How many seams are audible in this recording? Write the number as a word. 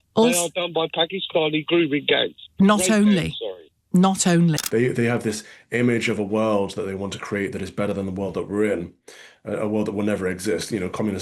one